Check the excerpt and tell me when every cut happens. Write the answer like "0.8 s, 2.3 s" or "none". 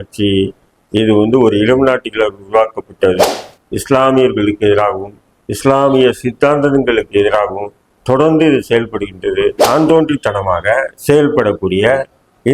9.6 s